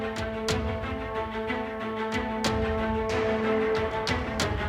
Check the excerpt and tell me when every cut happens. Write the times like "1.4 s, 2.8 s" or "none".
none